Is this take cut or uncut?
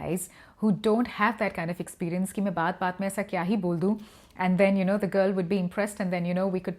uncut